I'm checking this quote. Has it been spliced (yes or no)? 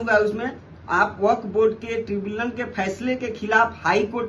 no